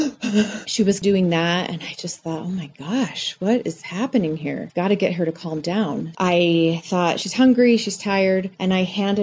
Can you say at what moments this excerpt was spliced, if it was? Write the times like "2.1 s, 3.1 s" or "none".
1.0 s, 6.1 s